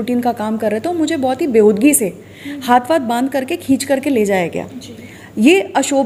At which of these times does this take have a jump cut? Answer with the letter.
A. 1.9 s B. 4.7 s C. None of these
C